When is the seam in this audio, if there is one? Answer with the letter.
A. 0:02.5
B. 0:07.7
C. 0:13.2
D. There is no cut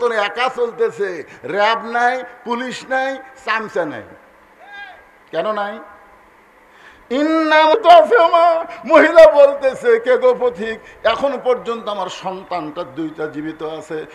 B